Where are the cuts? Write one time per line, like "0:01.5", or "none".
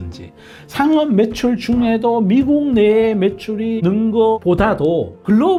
none